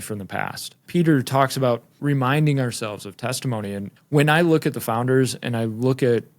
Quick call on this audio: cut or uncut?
cut